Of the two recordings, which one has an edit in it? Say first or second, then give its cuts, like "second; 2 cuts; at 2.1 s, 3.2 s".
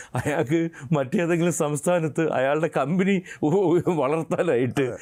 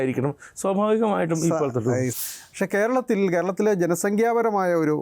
second; 1 cut; at 2.1 s